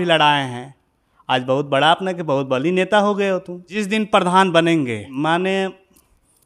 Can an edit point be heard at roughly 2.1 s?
no; 2 cuts; at 3.8 s, 5.0 s

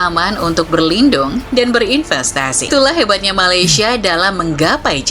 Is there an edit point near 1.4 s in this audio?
no; 1 cut; at 2.7 s

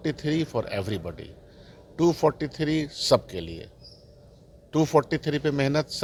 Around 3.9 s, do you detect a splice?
no; 0 cuts

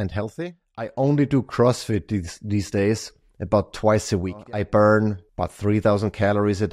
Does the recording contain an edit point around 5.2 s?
yes; 3 cuts; at 0.9 s, 4.4 s, 5.2 s

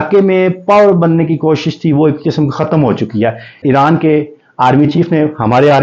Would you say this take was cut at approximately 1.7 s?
no; 1 cut; at 3.6 s

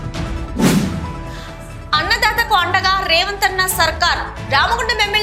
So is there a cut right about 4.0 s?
no; 1 cut; at 1.1 s

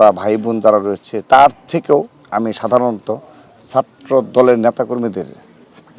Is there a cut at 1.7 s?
no; 0 cuts

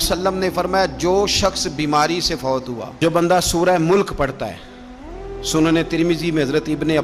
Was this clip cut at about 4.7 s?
no; 1 cut; at 2.9 s

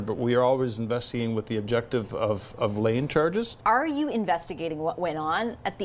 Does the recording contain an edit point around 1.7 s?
no; 1 cut; at 3.5 s

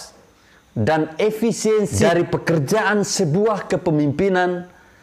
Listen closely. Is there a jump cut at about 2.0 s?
yes; 1 cut; at 2.0 s

